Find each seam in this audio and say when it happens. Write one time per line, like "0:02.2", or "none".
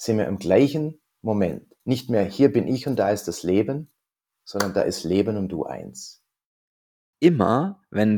0:01.7
0:07.1